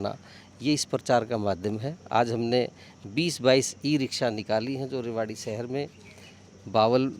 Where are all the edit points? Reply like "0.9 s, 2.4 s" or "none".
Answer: none